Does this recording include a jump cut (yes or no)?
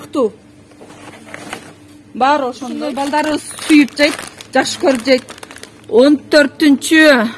yes